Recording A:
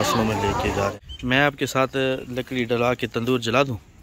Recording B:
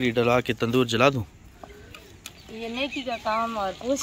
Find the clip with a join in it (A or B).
A